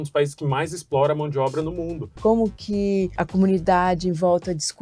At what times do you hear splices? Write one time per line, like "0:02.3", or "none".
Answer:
0:02.1